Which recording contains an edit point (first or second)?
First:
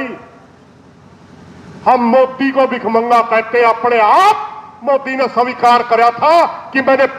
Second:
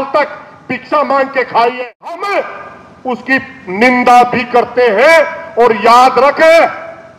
second